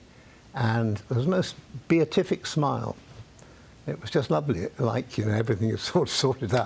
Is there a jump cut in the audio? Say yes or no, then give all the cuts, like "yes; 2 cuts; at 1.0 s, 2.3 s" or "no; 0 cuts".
no; 0 cuts